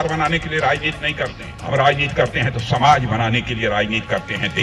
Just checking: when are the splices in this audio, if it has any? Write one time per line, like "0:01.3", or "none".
0:01.5